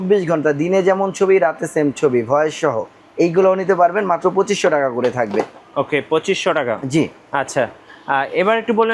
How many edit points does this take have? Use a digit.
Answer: 0